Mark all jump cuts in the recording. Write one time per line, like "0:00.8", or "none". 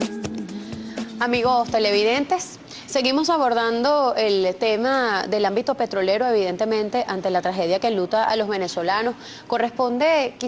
0:08.1